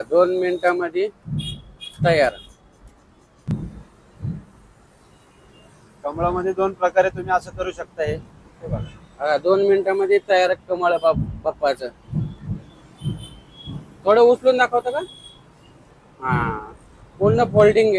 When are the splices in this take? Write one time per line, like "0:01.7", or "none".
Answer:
none